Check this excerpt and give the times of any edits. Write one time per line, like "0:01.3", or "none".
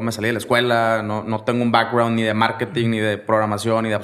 none